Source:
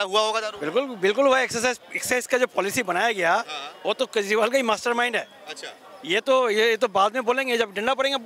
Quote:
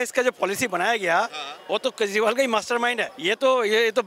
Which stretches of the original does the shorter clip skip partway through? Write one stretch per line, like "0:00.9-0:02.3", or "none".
0:05.2-0:05.9